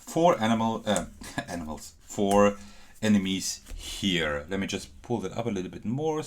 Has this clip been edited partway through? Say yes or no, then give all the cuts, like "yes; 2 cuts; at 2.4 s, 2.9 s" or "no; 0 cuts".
no; 0 cuts